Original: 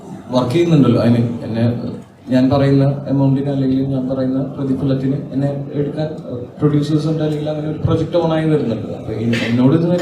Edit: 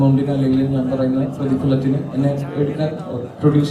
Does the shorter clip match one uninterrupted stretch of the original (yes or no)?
yes